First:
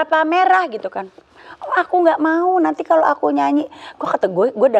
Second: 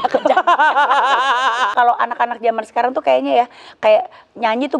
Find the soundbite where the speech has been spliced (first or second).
second